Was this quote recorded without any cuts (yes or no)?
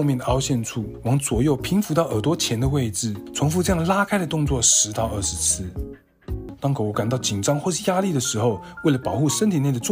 no